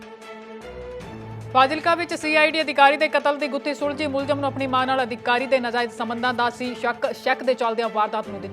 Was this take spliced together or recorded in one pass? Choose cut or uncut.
cut